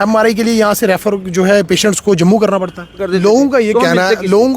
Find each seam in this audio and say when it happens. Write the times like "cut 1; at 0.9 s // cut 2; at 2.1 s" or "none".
cut 1; at 3.0 s